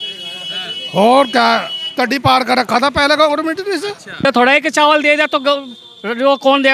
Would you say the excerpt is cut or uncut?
cut